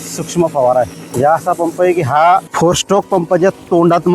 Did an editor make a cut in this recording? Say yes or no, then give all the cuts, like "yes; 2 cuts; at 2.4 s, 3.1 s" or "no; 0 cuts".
yes; 2 cuts; at 1.1 s, 2.5 s